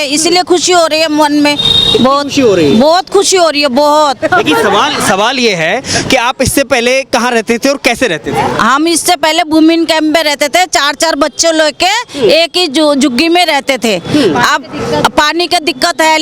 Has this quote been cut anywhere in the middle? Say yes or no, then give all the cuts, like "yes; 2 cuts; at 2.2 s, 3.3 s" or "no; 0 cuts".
no; 0 cuts